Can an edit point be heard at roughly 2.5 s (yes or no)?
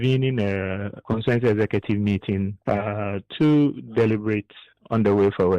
yes